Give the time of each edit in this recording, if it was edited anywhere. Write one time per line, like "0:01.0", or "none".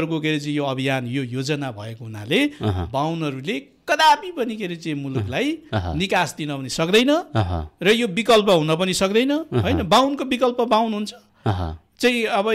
none